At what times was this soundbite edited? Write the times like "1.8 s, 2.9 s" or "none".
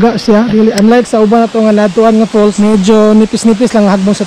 2.6 s